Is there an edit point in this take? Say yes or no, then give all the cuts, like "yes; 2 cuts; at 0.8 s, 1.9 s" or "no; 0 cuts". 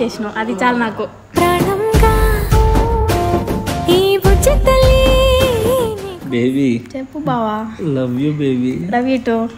yes; 1 cut; at 6.1 s